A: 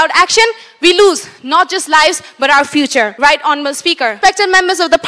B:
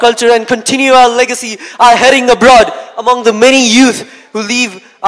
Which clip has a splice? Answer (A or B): A